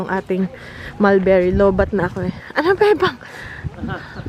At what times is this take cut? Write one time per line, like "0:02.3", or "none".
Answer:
none